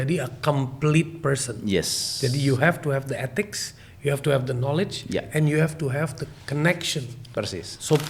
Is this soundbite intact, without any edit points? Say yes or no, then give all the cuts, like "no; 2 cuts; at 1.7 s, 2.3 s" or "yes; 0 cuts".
yes; 0 cuts